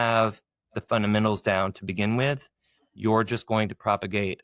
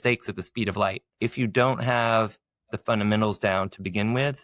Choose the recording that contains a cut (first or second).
second